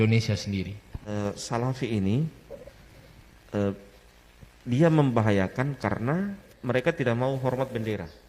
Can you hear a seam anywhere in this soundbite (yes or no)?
yes